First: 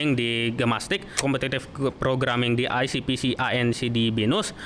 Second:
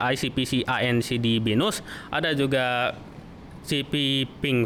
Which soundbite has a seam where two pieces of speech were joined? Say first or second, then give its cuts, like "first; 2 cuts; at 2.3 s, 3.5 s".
first; 1 cut; at 1.2 s